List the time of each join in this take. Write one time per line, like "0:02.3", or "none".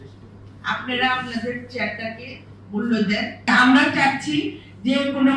0:03.5